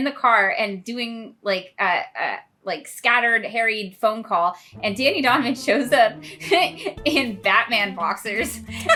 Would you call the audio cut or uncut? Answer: uncut